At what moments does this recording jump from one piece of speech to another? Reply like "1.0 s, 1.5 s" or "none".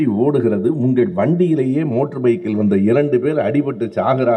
none